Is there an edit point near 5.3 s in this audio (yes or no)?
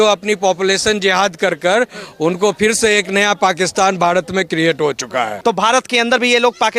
yes